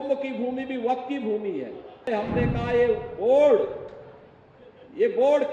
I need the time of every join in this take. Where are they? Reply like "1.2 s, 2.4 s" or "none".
2.1 s